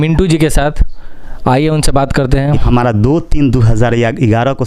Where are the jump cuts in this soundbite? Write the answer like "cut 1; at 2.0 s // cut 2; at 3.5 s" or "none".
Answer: cut 1; at 2.6 s